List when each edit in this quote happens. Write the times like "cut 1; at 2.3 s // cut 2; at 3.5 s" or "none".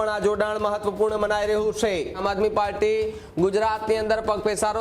cut 1; at 2.2 s